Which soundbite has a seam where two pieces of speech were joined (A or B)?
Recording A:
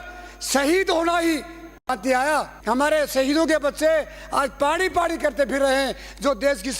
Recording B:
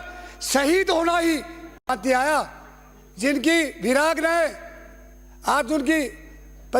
A